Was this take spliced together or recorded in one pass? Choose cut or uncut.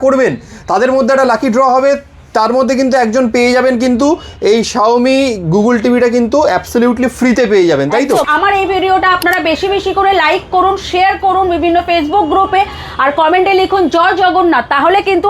cut